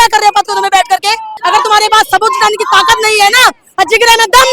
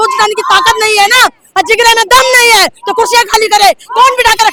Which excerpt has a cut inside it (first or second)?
first